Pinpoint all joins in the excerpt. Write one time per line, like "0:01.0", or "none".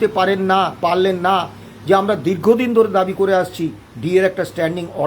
none